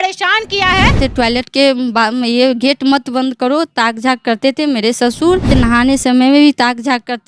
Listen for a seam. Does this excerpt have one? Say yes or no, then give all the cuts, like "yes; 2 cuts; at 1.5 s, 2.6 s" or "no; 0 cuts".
yes; 2 cuts; at 1.0 s, 5.5 s